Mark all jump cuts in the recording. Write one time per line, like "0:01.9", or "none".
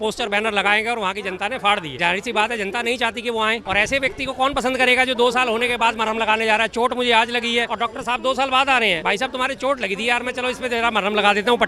0:01.9
0:03.6
0:07.7
0:09.0